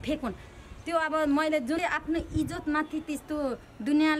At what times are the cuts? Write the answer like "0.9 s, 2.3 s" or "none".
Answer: 1.8 s